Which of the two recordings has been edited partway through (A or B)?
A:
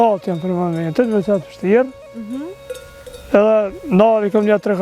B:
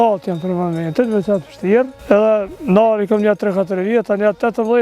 B